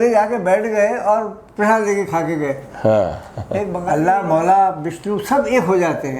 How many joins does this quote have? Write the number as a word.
one